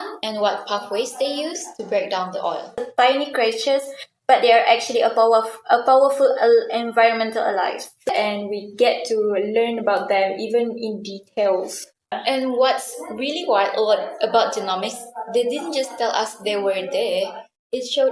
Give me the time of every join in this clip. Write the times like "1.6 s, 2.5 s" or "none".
2.8 s, 8.1 s, 12.1 s